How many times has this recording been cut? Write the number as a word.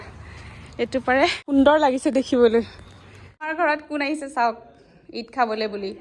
two